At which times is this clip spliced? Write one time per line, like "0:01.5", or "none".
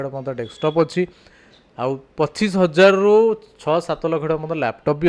none